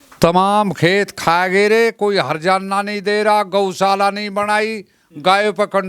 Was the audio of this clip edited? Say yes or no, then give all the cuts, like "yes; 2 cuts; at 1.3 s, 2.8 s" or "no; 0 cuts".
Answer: no; 0 cuts